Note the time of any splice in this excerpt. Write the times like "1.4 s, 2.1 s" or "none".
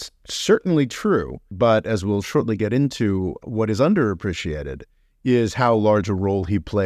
1.5 s, 3.4 s